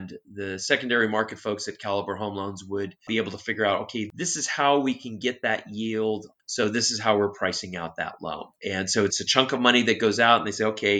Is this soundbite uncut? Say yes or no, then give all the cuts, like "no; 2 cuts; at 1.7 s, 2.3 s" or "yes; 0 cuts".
no; 1 cut; at 6.3 s